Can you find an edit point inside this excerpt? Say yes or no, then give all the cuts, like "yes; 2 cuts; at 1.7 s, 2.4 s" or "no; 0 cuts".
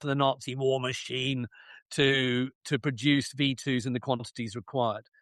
no; 0 cuts